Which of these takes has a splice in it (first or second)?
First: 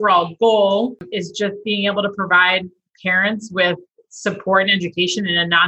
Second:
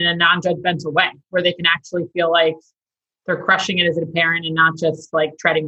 first